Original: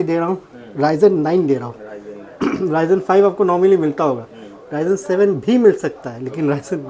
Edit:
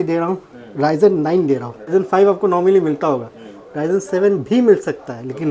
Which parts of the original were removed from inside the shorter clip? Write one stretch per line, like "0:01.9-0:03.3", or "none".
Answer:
0:01.9-0:02.9